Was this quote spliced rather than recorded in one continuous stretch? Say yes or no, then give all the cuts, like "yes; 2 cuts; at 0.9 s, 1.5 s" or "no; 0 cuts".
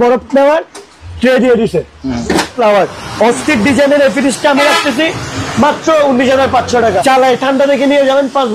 yes; 2 cuts; at 2.5 s, 7.0 s